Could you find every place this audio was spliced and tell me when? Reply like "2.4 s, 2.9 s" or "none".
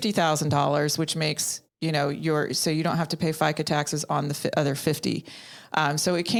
none